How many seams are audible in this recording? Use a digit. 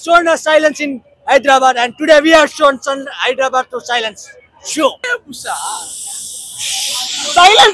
1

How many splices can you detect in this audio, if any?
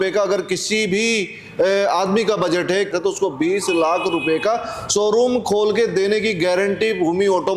1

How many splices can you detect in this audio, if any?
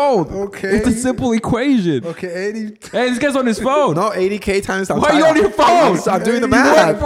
0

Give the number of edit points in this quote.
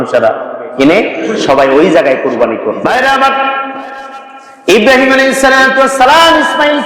1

